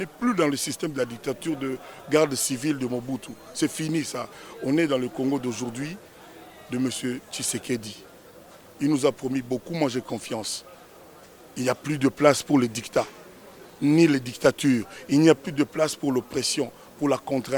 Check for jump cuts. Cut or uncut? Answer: uncut